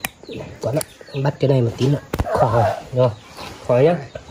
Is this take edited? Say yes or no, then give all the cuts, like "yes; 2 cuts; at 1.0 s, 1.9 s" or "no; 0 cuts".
no; 0 cuts